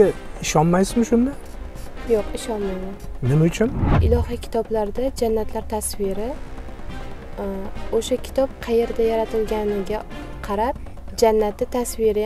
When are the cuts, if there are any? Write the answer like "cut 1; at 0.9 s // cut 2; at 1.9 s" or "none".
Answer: cut 1; at 3.9 s